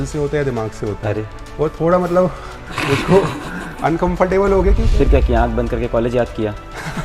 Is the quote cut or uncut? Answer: cut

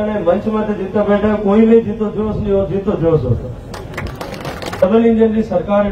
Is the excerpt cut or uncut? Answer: cut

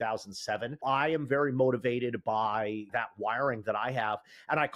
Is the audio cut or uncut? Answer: cut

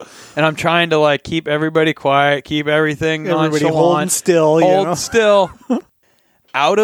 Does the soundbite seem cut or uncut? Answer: cut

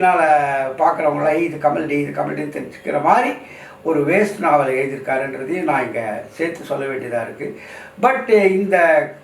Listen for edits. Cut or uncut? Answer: uncut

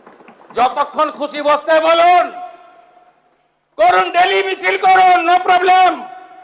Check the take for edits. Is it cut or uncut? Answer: uncut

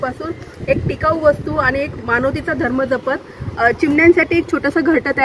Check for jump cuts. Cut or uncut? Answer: uncut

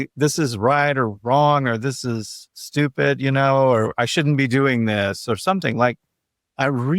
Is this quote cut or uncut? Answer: uncut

